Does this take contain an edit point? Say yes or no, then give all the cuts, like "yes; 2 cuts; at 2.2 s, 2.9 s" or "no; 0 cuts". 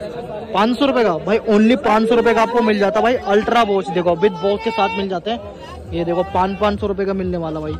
no; 0 cuts